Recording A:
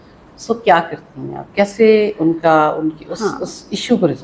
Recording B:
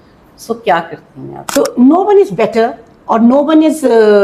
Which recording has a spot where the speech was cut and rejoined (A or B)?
B